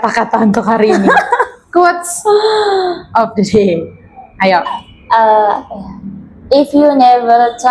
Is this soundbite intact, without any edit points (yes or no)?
yes